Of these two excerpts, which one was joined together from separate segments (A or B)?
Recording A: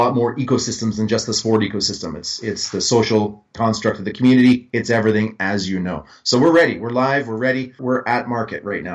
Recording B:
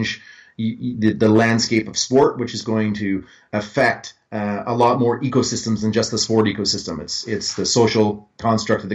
A